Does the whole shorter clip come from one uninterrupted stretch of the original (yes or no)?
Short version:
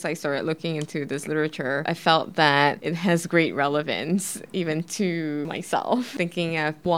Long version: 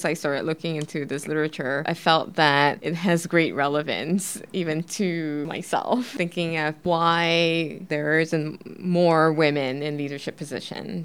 yes